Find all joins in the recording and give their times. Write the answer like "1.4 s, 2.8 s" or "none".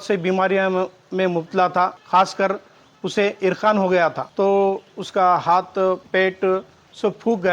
2.0 s, 4.2 s, 6.0 s